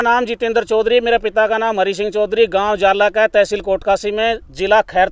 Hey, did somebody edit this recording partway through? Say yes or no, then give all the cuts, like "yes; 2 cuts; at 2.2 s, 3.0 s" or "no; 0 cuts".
no; 0 cuts